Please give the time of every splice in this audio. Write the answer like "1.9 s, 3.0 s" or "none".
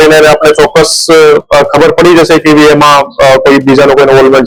none